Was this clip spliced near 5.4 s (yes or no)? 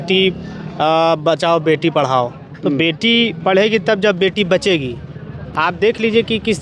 no